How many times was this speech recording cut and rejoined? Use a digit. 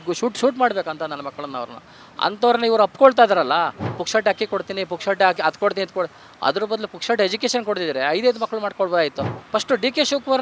2